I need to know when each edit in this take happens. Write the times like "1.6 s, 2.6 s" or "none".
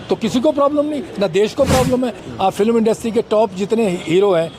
2.2 s